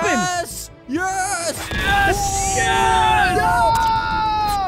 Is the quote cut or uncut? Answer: uncut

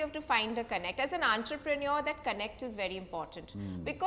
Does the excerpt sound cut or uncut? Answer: uncut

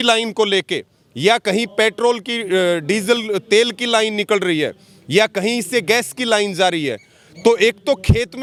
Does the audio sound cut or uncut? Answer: uncut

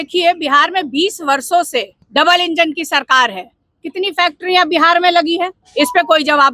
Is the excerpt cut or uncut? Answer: cut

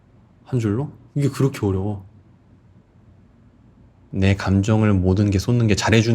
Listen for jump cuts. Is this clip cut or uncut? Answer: cut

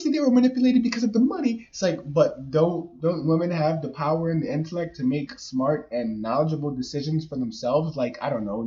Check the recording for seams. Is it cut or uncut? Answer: uncut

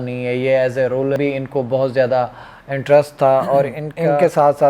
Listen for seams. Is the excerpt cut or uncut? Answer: cut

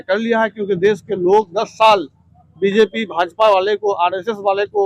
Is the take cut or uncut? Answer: uncut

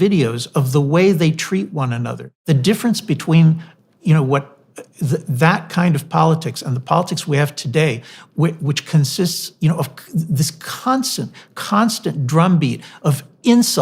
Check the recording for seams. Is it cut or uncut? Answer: cut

